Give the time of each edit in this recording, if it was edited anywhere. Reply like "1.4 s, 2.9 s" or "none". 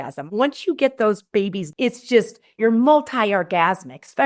1.7 s